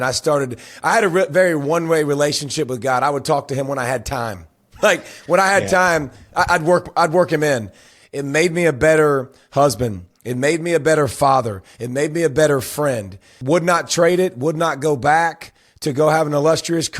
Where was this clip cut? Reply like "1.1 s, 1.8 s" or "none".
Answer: 7.8 s, 13.3 s